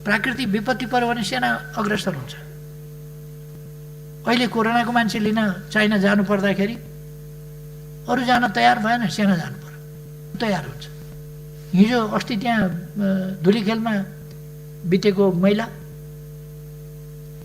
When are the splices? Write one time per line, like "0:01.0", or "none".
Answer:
0:10.4